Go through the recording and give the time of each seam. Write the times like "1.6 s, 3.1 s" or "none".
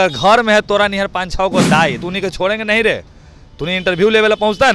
2.0 s